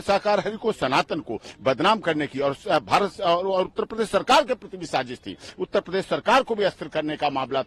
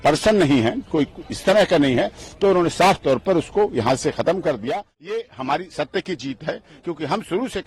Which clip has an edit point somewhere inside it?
second; 1 cut; at 4.6 s

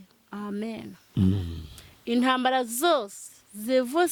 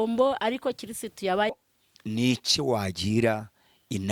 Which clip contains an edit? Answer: second; 1 cut; at 1.6 s

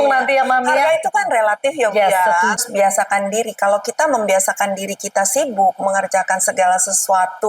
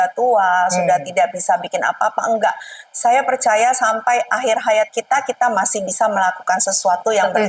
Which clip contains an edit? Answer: first; 1 cut; at 2.7 s

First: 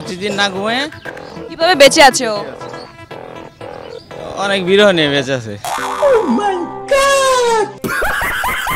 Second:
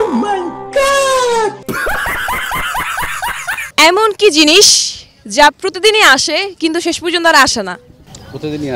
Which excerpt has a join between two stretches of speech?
second; 2 cuts; at 3.6 s, 7.8 s

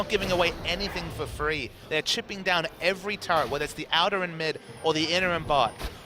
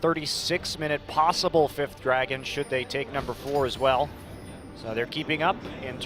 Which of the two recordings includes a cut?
second; 1 cut; at 1.3 s

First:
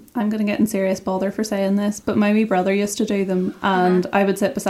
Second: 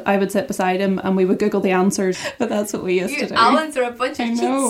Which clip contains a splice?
second; 1 cut; at 2.2 s

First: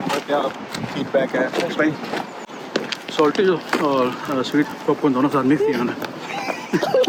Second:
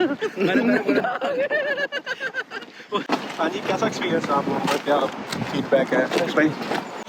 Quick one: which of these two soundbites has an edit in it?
second; 1 cut; at 3.1 s

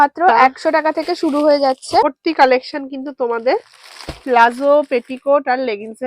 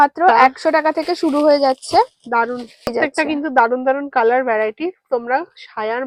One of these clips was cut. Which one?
first; 1 cut; at 2.0 s

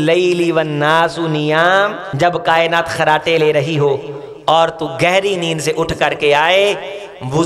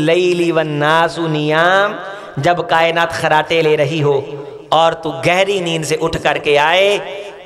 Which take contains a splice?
first; 1 cut; at 2.0 s

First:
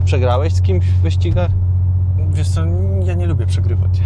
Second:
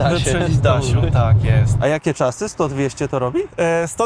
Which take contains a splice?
second; 1 cut; at 1.7 s

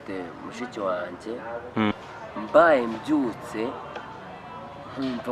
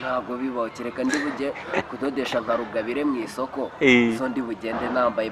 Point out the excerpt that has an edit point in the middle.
first; 1 cut; at 1.9 s

